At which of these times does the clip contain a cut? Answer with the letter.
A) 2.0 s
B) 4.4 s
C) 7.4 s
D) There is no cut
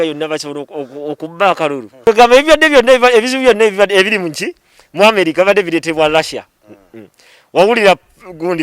A